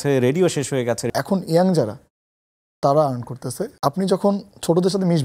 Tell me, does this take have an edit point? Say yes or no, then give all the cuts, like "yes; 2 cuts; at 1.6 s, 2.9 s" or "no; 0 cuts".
yes; 2 cuts; at 1.1 s, 3.7 s